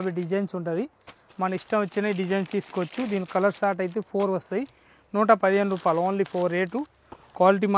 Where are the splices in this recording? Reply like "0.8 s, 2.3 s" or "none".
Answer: none